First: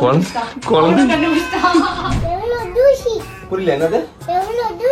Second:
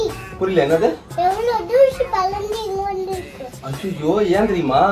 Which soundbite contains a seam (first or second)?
first